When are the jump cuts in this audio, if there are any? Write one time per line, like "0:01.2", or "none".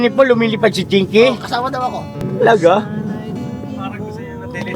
0:02.2